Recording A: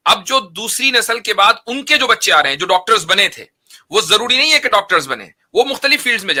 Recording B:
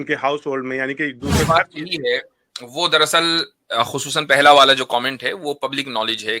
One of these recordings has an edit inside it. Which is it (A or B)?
B